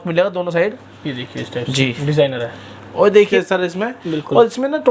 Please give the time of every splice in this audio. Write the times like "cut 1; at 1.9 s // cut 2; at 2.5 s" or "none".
cut 1; at 3.3 s